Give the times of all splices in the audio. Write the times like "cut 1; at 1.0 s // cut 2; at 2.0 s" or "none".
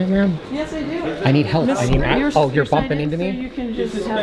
cut 1; at 1.0 s